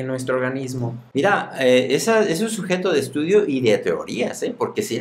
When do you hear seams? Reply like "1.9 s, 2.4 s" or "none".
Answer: 1.0 s